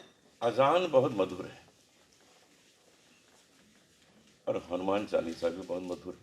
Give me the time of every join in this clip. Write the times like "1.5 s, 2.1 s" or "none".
none

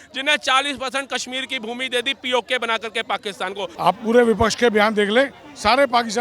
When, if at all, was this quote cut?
3.7 s

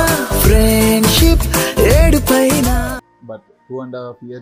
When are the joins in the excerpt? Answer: 3.1 s

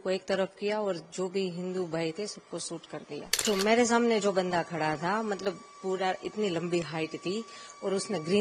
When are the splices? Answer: 3.3 s

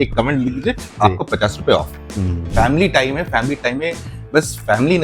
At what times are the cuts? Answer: 2.4 s

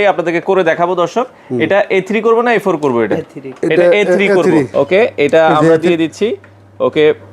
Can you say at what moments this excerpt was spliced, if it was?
4.7 s

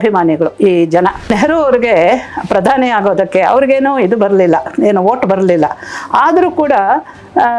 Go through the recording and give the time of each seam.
1.3 s

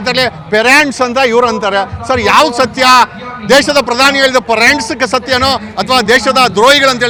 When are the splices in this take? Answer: none

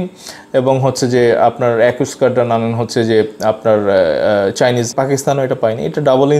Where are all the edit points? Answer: 4.9 s

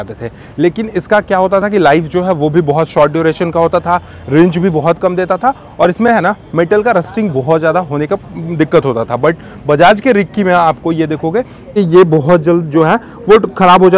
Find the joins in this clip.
11.8 s

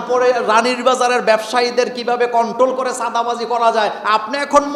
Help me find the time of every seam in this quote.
none

